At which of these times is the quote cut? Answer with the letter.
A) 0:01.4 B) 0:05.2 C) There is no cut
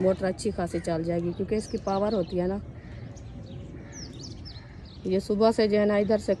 C